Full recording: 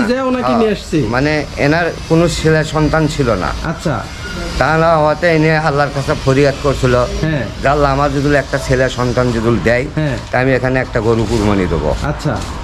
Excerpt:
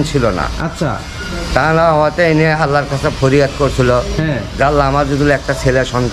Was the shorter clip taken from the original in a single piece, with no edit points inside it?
yes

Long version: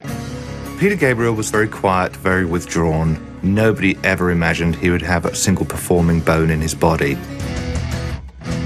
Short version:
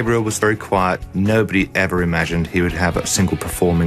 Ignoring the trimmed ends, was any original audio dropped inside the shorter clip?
yes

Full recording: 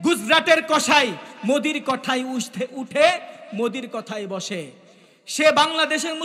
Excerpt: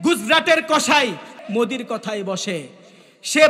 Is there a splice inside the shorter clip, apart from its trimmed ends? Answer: yes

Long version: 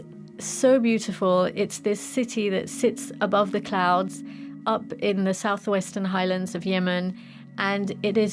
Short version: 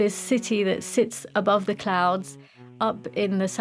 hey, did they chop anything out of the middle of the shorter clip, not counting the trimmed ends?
no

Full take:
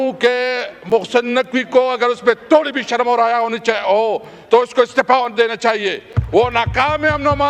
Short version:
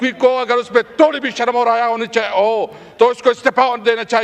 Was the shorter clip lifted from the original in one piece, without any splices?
yes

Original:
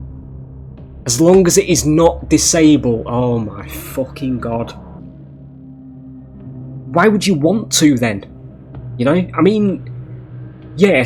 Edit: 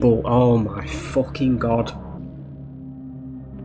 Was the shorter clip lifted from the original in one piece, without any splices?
yes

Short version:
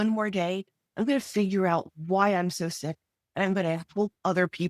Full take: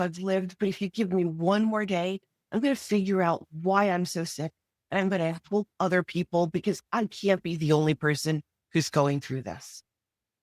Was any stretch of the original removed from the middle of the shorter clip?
no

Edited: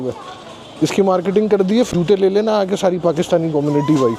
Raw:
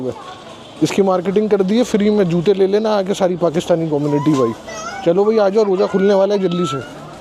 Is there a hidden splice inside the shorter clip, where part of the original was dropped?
yes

